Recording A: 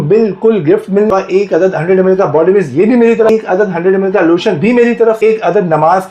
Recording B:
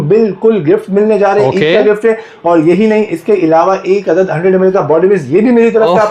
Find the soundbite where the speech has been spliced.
A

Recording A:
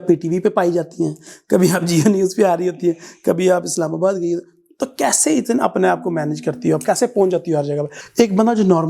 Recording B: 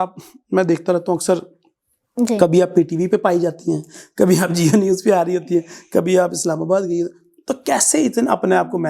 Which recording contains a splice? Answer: A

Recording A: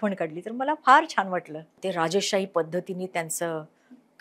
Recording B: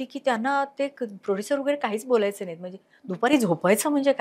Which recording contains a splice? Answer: A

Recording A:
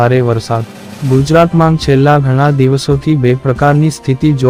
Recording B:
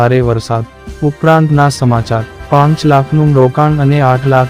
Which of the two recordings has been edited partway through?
B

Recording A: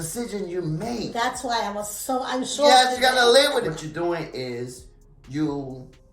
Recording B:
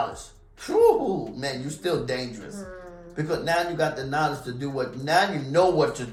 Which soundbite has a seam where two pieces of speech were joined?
A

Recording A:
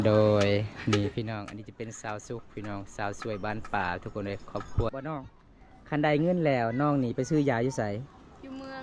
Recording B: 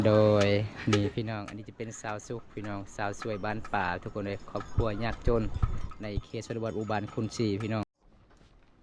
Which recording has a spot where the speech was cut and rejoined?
A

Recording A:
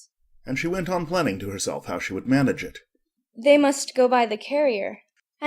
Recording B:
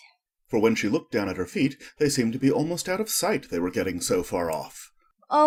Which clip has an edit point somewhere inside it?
A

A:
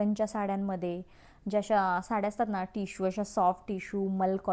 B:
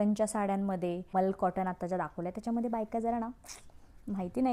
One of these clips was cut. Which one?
B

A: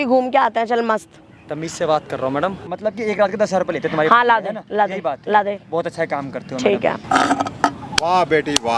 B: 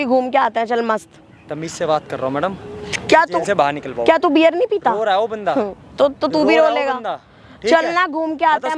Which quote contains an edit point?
A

